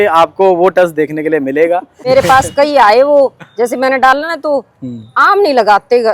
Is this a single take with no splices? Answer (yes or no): no